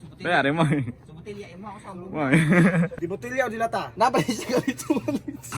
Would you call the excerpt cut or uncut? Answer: cut